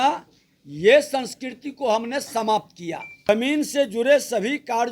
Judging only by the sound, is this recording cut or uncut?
cut